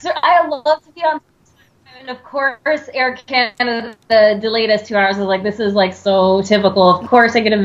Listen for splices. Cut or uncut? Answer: cut